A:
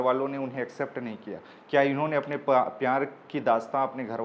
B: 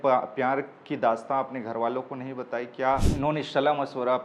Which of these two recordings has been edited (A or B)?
B